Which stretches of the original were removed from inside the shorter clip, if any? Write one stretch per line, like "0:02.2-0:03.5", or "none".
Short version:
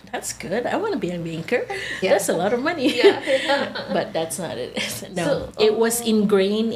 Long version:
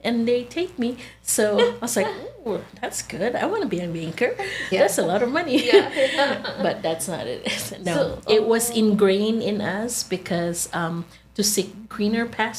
none